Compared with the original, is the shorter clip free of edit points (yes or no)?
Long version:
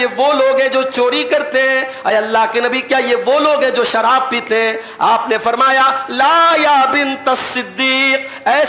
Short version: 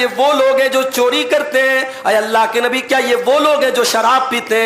yes